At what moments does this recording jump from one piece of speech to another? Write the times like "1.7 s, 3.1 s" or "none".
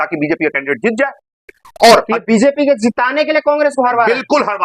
none

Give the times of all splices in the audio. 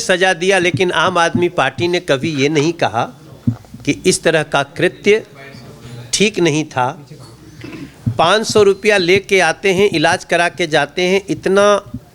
none

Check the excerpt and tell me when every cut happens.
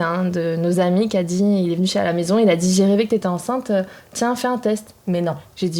none

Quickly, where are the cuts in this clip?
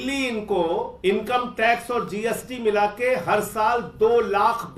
0.9 s

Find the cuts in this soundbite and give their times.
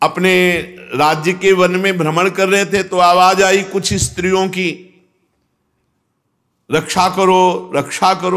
none

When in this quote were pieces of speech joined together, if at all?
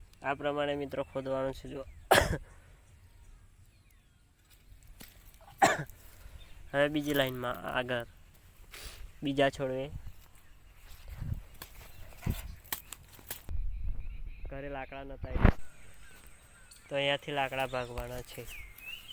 13.5 s

